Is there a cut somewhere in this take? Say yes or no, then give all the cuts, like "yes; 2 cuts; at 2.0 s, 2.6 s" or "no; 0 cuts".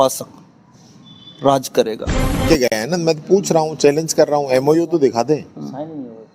yes; 1 cut; at 2.6 s